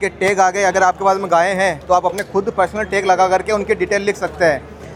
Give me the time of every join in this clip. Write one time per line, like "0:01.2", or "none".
none